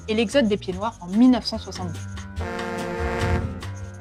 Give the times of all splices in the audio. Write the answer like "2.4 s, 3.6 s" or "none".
none